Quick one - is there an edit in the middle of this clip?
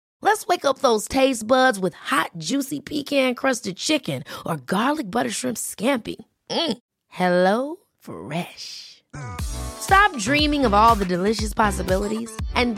no; 0 cuts

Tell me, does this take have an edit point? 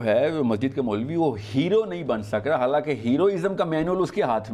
no; 0 cuts

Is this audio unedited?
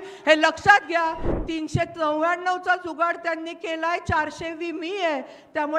no; 1 cut; at 1.3 s

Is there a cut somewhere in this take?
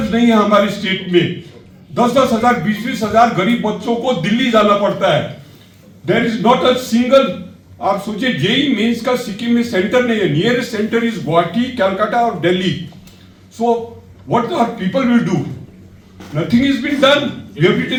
no; 0 cuts

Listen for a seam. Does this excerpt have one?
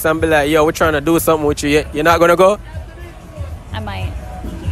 no; 0 cuts

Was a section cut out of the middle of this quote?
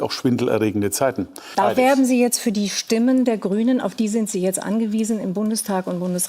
yes; 1 cut; at 1.4 s

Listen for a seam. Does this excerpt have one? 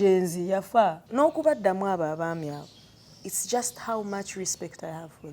yes; 1 cut; at 1.0 s

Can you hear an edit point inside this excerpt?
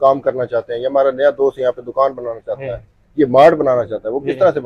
no; 0 cuts

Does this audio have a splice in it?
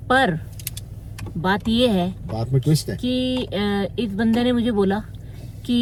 no; 0 cuts

